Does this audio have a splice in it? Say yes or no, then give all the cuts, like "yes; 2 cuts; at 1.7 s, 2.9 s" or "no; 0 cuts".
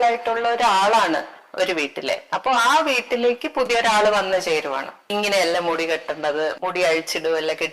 yes; 1 cut; at 5.0 s